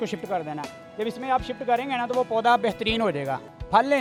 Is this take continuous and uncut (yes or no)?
yes